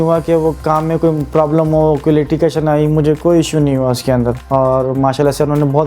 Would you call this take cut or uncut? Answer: cut